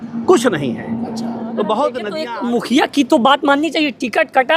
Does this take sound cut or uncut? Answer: cut